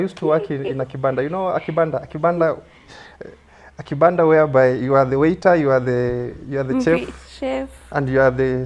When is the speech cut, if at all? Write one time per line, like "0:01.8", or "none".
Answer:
none